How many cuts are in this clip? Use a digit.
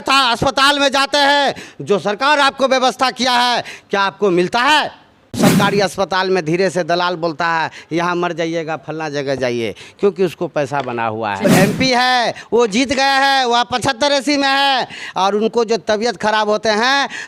2